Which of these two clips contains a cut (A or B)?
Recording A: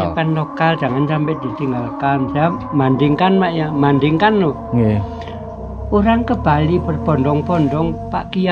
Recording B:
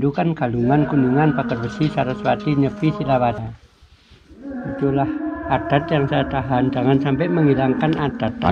B